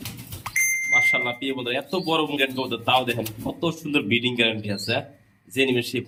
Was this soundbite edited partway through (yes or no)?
no